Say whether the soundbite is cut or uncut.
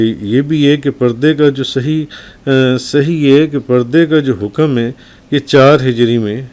uncut